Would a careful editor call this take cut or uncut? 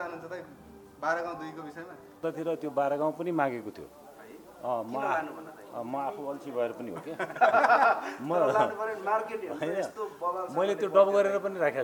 cut